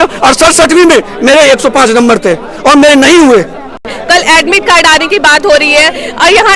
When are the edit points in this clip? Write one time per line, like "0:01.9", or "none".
0:03.9